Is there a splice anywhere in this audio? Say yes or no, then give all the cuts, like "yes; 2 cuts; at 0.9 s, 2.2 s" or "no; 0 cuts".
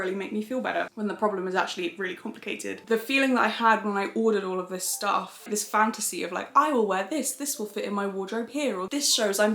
yes; 2 cuts; at 2.8 s, 5.4 s